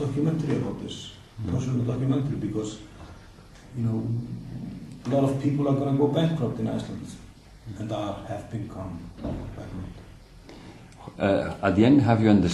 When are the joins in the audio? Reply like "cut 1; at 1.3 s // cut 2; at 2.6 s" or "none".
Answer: none